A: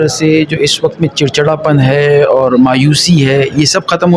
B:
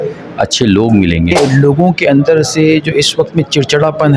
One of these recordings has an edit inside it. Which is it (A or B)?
B